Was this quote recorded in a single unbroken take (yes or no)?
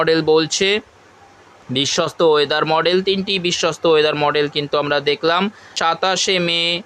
no